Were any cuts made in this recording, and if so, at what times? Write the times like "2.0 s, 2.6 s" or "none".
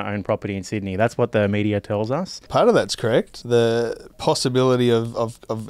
2.4 s, 3.3 s, 4.1 s